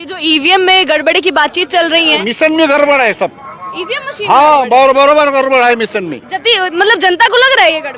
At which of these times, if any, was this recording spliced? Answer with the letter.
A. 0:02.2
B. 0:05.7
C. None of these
A